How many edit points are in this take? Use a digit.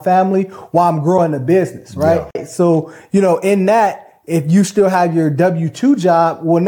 1